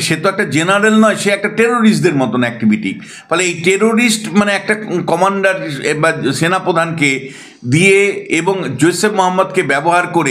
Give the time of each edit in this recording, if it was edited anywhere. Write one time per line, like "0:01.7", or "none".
none